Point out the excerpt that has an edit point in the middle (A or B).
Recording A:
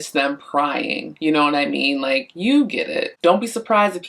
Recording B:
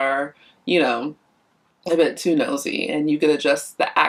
A